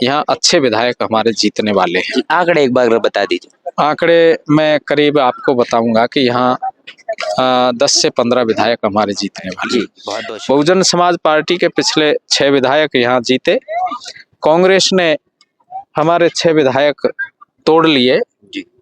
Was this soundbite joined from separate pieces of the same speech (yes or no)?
yes